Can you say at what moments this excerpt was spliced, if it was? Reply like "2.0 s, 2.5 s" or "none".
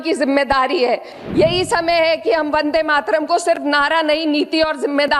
1.2 s